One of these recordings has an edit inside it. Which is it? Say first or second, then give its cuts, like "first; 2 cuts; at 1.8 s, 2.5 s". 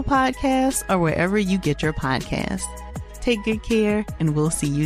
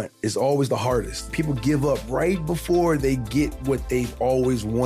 second; 1 cut; at 1.1 s